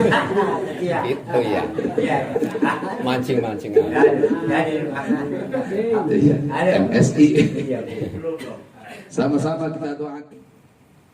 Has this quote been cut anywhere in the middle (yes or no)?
yes